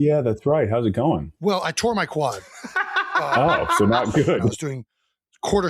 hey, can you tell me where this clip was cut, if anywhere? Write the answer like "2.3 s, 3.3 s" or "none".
1.3 s, 4.5 s